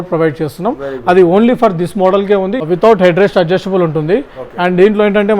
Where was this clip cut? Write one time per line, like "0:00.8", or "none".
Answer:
0:02.6